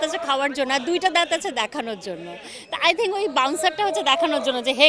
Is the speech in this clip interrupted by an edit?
no; 0 cuts

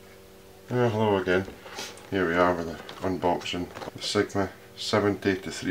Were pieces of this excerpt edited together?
yes; 1 cut; at 3.8 s

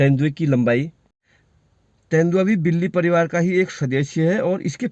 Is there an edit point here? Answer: no; 0 cuts

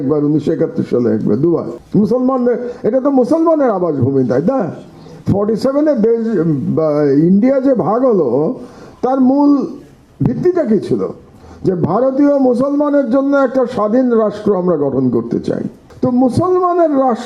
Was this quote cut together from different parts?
yes; 2 cuts; at 1.8 s, 15.8 s

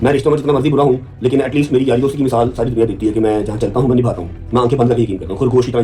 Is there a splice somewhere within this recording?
no; 0 cuts

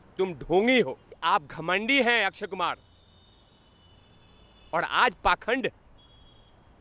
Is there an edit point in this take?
yes; 1 cut; at 1.1 s

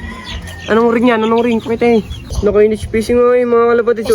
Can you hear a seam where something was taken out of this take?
yes; 1 cut; at 2.3 s

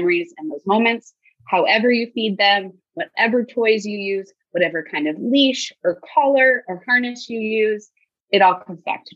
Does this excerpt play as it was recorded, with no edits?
no; 1 cut; at 8.1 s

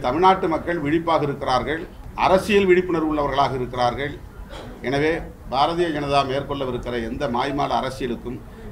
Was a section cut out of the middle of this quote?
yes; 1 cut; at 2.0 s

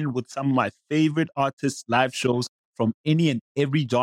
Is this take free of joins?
yes; 0 cuts

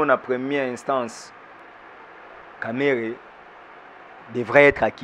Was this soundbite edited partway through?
yes; 1 cut; at 1.6 s

